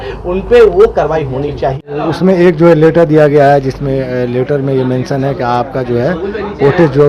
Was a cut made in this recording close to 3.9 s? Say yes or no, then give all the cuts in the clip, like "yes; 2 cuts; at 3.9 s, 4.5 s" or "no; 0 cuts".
no; 1 cut; at 2.0 s